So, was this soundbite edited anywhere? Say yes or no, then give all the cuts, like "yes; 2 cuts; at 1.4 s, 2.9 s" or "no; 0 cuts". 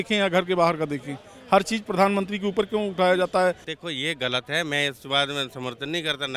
yes; 1 cut; at 3.7 s